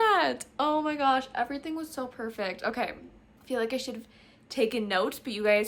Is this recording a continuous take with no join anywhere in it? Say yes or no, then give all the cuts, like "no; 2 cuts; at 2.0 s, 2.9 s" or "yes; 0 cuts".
yes; 0 cuts